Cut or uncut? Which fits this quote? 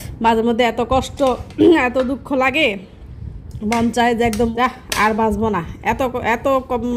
cut